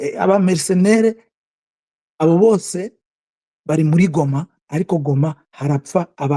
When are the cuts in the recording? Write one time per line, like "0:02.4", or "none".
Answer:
none

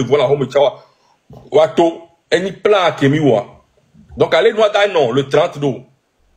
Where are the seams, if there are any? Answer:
none

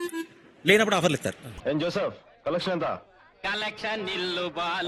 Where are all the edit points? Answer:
0:01.6

